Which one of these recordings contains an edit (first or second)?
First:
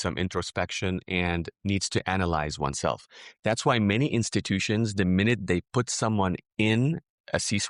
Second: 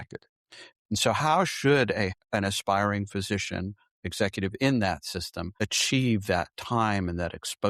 second